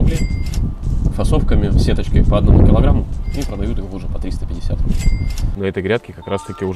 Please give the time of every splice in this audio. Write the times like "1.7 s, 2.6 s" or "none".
5.5 s